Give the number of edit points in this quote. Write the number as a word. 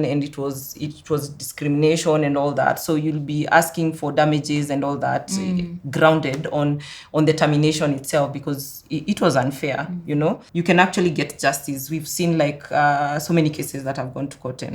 one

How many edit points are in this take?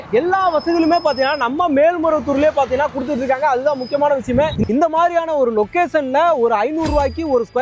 one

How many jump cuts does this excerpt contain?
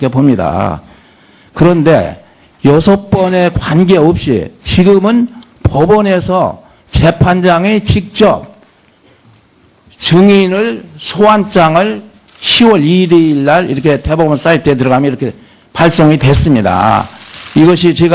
zero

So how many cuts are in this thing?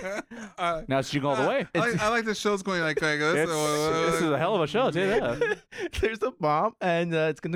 zero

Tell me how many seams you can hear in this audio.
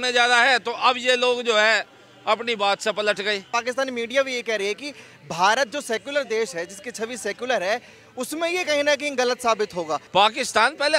two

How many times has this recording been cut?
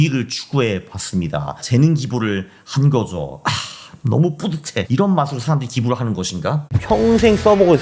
three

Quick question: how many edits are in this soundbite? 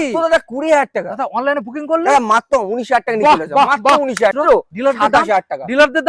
one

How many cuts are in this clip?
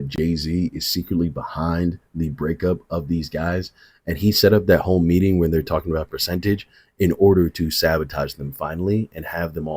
zero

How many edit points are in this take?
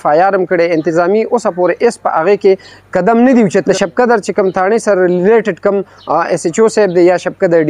one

